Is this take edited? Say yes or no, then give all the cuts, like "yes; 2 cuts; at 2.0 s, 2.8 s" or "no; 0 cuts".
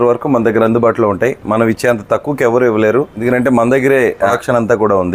no; 0 cuts